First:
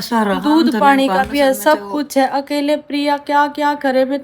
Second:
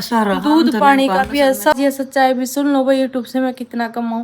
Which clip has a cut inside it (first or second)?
second